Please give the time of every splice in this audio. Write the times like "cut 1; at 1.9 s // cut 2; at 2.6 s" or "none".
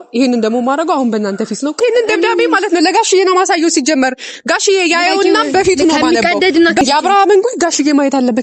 cut 1; at 1.8 s // cut 2; at 6.8 s